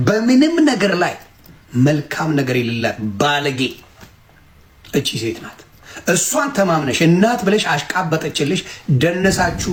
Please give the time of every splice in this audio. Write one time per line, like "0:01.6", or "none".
none